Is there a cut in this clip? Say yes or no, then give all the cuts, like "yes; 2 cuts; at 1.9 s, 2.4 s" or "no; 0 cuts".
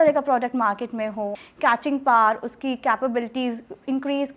yes; 1 cut; at 1.4 s